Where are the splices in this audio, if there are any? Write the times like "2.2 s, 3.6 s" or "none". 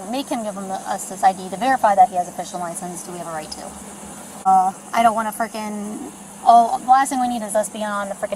4.5 s